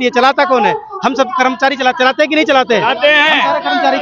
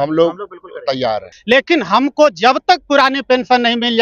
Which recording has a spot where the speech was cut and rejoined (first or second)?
second